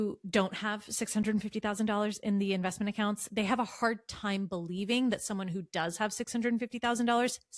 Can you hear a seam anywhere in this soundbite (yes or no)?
no